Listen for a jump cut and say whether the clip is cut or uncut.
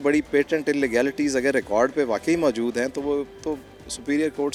uncut